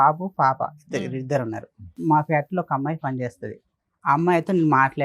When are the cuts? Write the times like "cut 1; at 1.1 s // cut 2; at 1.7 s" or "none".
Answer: cut 1; at 2.0 s